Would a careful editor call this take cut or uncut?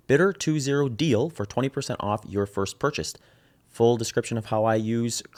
uncut